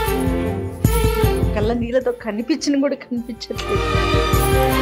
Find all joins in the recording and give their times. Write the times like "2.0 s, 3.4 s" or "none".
none